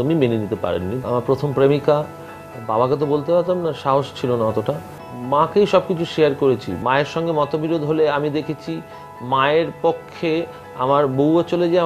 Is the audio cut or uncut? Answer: cut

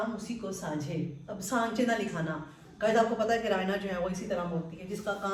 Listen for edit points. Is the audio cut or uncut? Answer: uncut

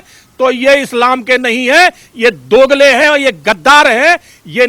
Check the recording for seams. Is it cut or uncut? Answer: uncut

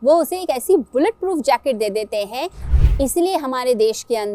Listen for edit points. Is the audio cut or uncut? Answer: cut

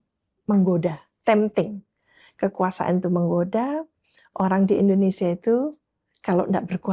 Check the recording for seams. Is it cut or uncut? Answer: uncut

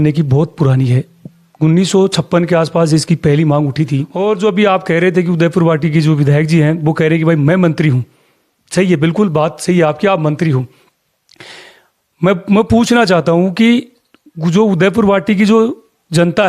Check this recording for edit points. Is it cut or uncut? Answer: cut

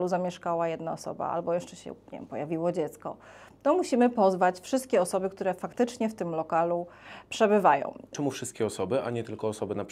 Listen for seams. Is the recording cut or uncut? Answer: cut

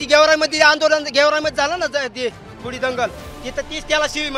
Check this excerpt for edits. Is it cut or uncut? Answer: uncut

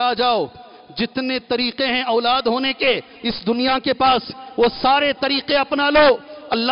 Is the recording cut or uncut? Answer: uncut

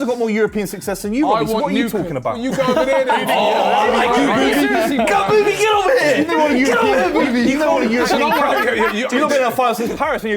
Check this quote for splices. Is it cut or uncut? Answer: uncut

